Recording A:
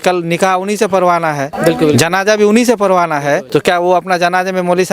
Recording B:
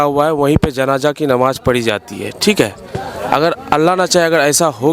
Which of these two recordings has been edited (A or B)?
A